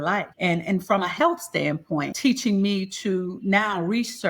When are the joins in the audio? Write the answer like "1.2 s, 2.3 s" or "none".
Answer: none